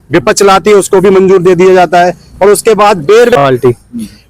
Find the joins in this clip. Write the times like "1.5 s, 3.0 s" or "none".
3.3 s